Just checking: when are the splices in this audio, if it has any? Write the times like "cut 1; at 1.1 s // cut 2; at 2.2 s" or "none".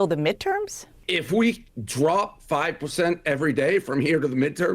cut 1; at 0.9 s